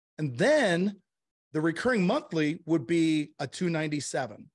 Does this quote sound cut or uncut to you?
uncut